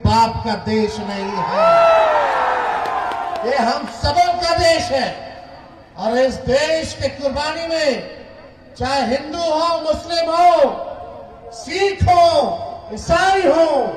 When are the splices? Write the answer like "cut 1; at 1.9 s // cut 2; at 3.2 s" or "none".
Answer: none